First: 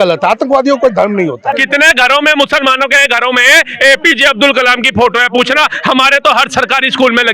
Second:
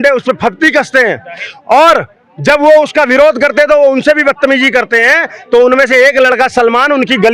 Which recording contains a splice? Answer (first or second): first